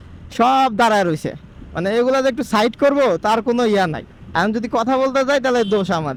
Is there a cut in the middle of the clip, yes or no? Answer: no